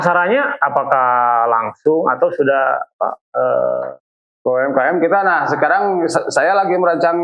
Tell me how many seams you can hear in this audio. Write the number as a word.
one